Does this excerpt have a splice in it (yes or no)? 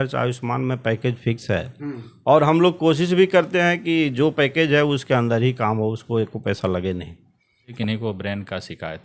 yes